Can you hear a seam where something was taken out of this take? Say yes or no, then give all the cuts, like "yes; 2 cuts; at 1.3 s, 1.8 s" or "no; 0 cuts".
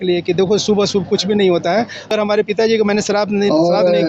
yes; 1 cut; at 2.1 s